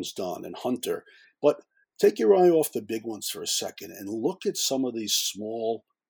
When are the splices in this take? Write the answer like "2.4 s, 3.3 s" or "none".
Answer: none